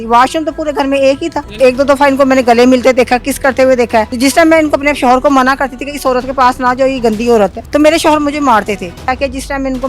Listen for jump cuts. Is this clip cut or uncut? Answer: cut